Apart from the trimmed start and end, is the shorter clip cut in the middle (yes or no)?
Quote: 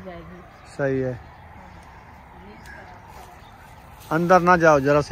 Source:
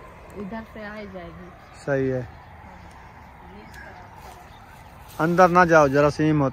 no